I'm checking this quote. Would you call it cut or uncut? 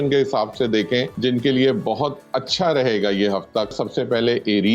cut